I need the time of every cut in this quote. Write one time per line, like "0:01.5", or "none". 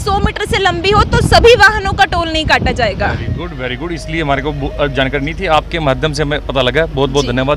none